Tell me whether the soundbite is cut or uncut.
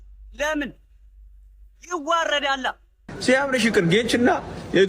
cut